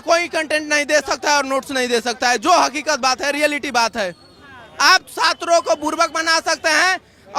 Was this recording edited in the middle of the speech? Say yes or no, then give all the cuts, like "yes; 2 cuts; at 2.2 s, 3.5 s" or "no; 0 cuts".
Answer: no; 0 cuts